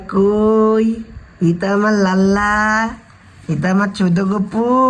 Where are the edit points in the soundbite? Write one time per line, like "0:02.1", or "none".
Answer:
none